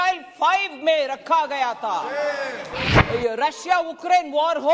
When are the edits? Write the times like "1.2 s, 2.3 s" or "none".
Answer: 2.8 s